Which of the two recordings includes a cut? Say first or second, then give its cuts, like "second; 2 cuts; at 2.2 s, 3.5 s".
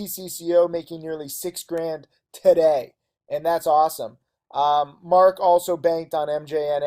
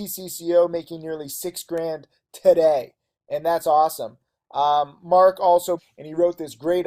first; 1 cut; at 5.8 s